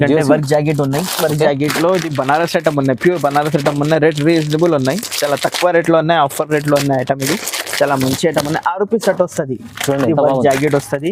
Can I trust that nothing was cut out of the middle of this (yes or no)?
yes